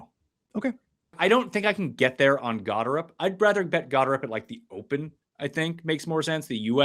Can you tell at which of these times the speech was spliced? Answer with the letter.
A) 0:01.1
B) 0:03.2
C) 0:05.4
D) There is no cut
A